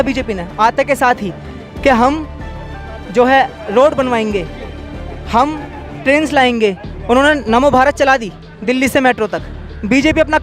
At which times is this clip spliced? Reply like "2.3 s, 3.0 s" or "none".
none